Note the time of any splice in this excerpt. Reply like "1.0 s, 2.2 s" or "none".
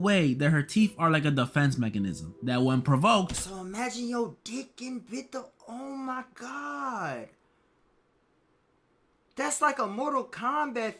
none